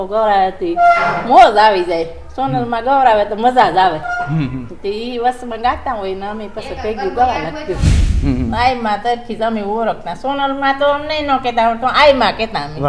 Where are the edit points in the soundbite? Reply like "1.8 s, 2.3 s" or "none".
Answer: 7.9 s

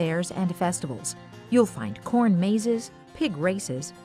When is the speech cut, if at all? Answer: none

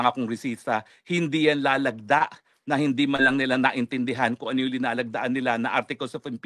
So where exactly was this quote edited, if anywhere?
none

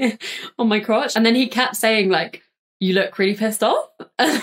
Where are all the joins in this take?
1.1 s

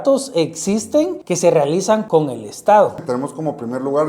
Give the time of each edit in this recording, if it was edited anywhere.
1.2 s, 2.0 s, 3.0 s

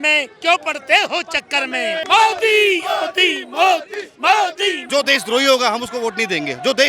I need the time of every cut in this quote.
2.0 s, 4.9 s

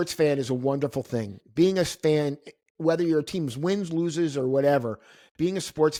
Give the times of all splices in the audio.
none

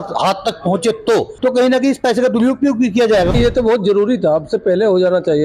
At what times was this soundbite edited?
1.3 s, 3.3 s

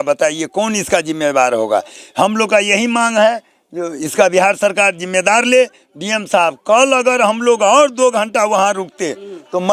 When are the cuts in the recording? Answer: none

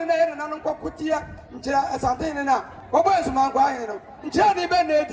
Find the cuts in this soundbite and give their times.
2.7 s

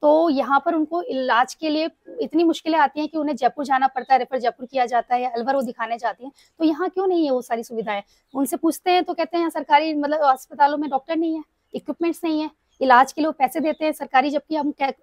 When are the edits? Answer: none

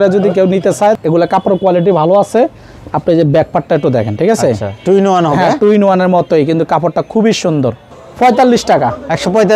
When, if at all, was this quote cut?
1.0 s, 7.8 s

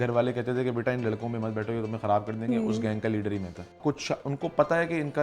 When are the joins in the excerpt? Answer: 3.7 s

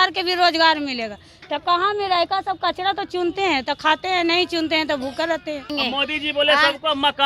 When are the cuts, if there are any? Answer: 5.7 s

